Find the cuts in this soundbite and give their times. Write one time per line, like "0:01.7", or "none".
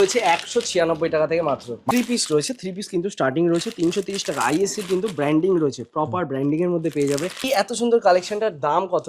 0:01.8
0:07.5